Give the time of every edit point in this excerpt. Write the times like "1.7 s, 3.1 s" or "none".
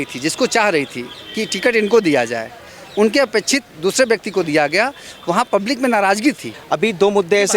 6.5 s